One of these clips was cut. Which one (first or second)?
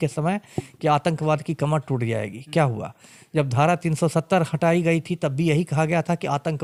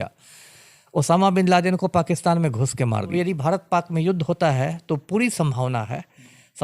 second